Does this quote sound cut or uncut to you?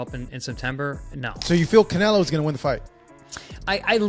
cut